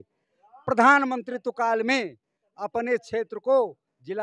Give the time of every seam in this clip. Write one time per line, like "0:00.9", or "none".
none